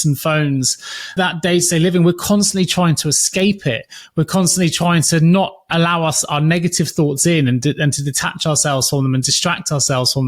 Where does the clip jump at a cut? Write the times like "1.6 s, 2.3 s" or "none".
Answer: 1.1 s

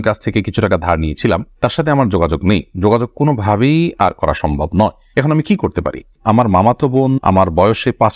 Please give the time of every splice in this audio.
6.2 s

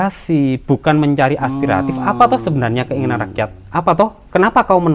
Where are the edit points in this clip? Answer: none

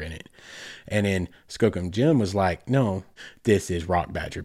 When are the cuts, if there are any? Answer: 3.1 s

